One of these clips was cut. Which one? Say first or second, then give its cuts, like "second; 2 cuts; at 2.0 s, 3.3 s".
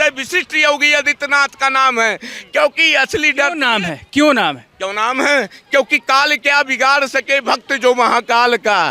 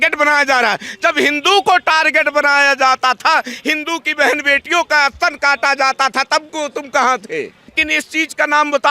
second; 1 cut; at 7.8 s